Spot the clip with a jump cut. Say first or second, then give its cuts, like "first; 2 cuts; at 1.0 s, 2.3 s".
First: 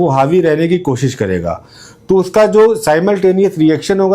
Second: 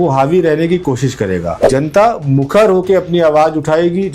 second; 1 cut; at 1.7 s